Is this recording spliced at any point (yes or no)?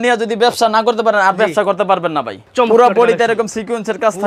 yes